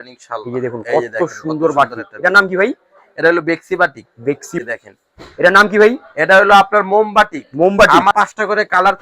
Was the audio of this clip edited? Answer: yes; 2 cuts; at 4.6 s, 8.1 s

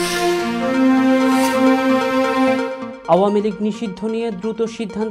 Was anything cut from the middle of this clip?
no; 0 cuts

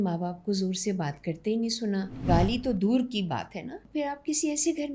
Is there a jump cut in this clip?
yes; 2 cuts; at 2.2 s, 3.8 s

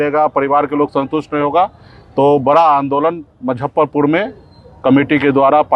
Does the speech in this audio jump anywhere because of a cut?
no; 0 cuts

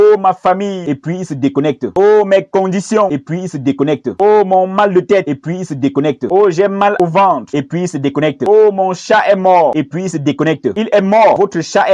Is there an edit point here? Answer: no; 0 cuts

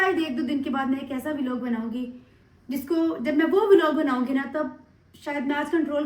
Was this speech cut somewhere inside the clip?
no; 0 cuts

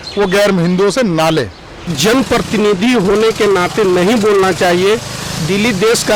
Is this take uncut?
no; 1 cut; at 1.9 s

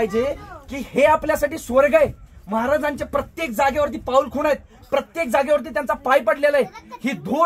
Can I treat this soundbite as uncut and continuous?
yes; 0 cuts

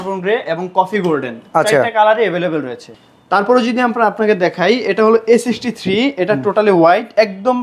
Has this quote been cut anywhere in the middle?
no; 0 cuts

